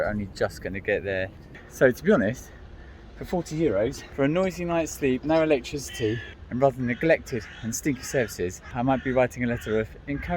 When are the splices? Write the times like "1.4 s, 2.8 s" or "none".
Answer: 1.6 s, 4.0 s, 8.7 s